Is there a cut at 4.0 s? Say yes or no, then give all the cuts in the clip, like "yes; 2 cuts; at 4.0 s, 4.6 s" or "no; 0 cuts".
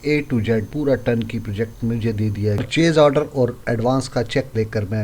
no; 1 cut; at 2.6 s